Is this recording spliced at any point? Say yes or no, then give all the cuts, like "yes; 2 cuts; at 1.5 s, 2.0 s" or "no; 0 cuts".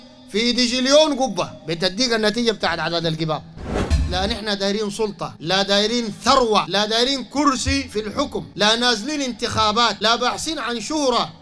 yes; 5 cuts; at 3.8 s, 5.3 s, 6.7 s, 8.5 s, 10.0 s